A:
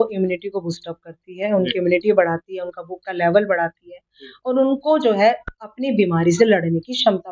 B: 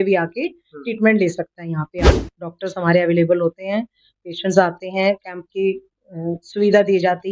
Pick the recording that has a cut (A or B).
B